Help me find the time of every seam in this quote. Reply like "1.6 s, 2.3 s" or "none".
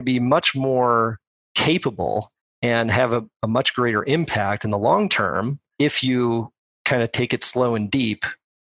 3.3 s, 5.7 s